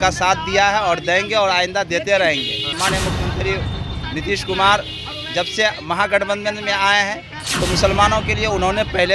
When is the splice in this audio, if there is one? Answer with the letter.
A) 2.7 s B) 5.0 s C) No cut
A